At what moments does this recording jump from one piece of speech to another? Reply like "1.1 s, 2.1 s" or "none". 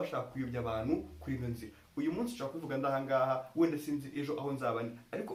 none